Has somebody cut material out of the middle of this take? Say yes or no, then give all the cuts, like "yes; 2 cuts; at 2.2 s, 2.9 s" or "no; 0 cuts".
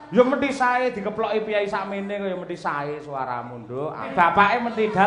yes; 1 cut; at 4.1 s